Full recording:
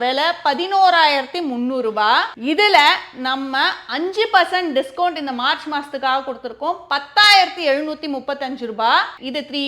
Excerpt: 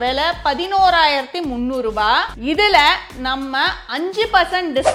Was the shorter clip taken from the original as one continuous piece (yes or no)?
yes